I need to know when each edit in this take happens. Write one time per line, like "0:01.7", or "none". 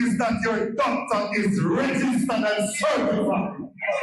none